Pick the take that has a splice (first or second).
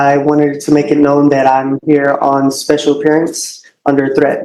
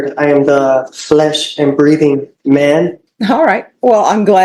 second